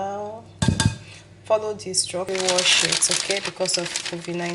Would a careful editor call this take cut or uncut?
cut